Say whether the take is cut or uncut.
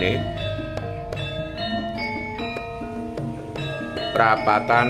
uncut